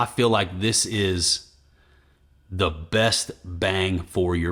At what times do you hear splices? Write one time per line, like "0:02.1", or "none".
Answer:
none